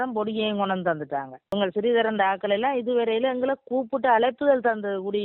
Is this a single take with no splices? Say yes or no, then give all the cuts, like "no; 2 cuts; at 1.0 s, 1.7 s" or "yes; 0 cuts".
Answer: no; 1 cut; at 1.4 s